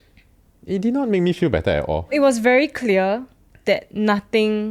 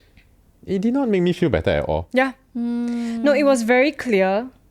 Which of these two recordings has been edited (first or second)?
first